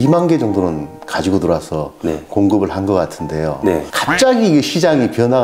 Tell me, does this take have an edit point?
no; 0 cuts

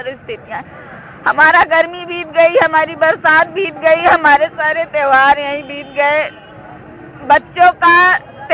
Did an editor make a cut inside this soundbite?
no; 0 cuts

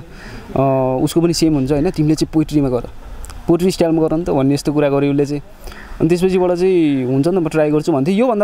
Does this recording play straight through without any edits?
yes; 0 cuts

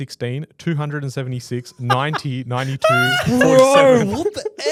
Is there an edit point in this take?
no; 0 cuts

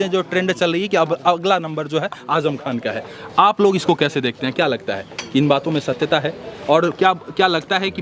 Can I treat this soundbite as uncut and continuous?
yes; 0 cuts

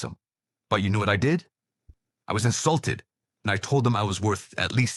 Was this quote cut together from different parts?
no; 0 cuts

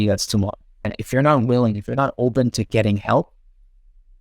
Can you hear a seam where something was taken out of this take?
yes; 1 cut; at 1.0 s

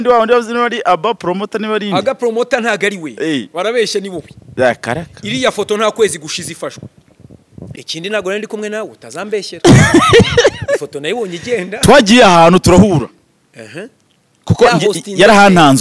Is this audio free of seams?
no; 1 cut; at 7.6 s

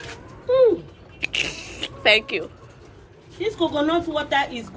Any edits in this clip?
no; 0 cuts

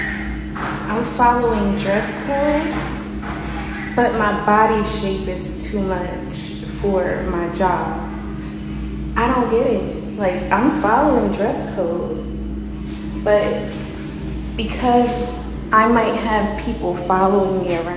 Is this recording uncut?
yes; 0 cuts

